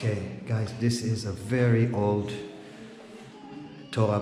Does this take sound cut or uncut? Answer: uncut